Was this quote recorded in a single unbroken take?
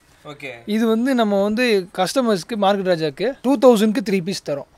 no; 2 cuts; at 1.9 s, 3.4 s

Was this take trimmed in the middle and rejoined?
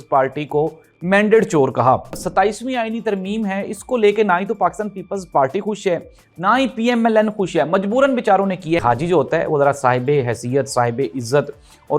yes; 2 cuts; at 2.2 s, 8.8 s

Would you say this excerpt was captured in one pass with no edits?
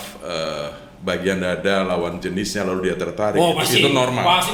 yes; 0 cuts

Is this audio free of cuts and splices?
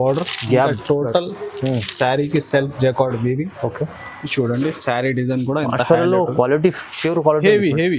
yes; 0 cuts

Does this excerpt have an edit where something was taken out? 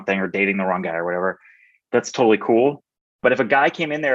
yes; 2 cuts; at 1.8 s, 3.2 s

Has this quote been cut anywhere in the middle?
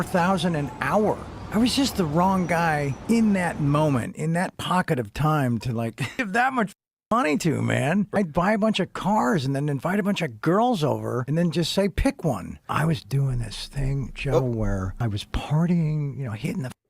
yes; 1 cut; at 15.4 s

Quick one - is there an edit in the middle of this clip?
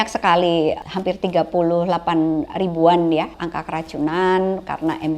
yes; 2 cuts; at 0.8 s, 3.4 s

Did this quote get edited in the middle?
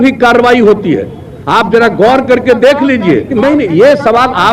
yes; 1 cut; at 3.3 s

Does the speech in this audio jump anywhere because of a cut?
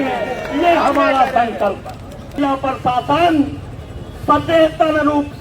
yes; 1 cut; at 2.4 s

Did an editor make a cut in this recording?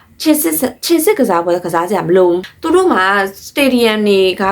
yes; 1 cut; at 2.5 s

